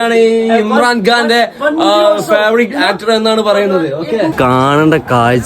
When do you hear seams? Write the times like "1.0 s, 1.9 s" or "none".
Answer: 4.3 s